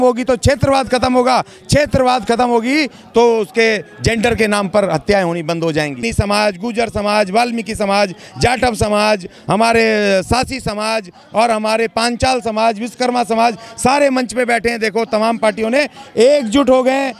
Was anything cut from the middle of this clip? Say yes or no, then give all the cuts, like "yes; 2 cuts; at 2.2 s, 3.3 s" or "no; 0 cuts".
yes; 1 cut; at 6.0 s